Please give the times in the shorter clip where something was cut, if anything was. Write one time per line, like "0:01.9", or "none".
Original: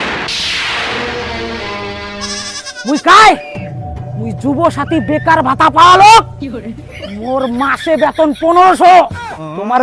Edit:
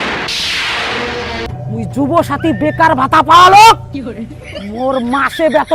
0:01.5